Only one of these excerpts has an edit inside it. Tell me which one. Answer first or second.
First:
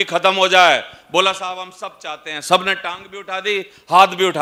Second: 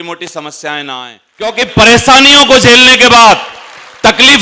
second